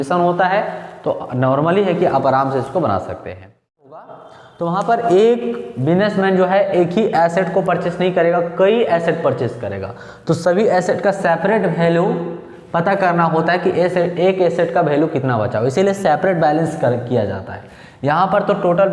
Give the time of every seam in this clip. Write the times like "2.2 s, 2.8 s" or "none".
4.0 s